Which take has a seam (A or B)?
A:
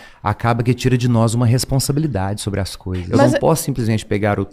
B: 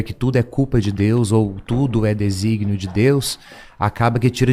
A